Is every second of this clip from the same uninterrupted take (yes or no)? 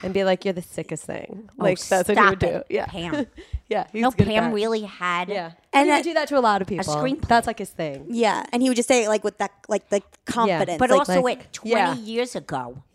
no